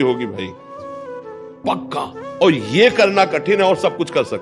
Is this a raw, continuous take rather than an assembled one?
yes; 0 cuts

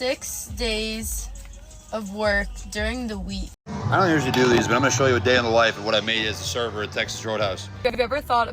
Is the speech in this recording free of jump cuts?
no; 2 cuts; at 3.6 s, 7.7 s

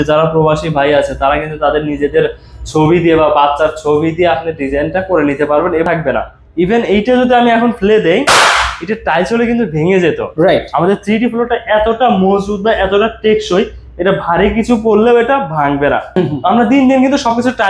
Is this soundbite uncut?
no; 2 cuts; at 5.9 s, 16.2 s

